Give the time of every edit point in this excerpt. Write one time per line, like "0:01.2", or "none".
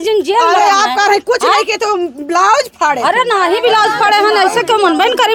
none